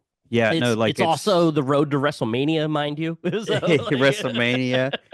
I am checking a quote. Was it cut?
no; 0 cuts

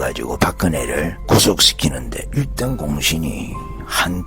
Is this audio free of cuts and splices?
no; 1 cut; at 1.2 s

